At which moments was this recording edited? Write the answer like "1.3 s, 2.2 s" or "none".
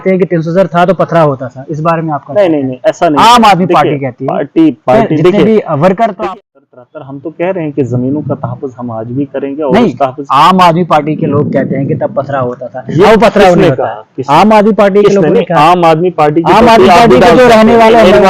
6.1 s

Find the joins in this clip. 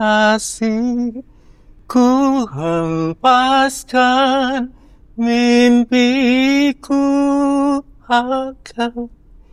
none

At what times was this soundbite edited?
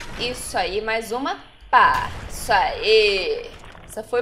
none

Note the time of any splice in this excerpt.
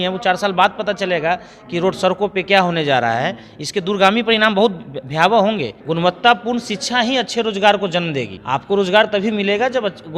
5.7 s, 8.4 s

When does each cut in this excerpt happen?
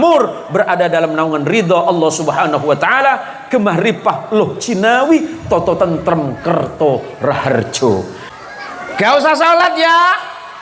8.2 s

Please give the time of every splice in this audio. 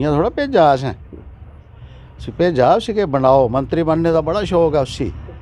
none

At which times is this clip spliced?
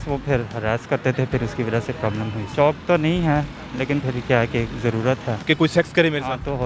2.4 s, 5.4 s

